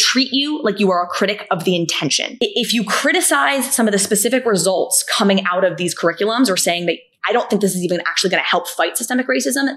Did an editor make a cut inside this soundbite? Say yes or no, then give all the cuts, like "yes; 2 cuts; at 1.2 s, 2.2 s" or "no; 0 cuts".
yes; 1 cut; at 2.2 s